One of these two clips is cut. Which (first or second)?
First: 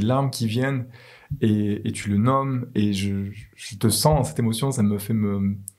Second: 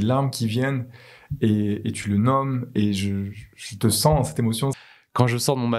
second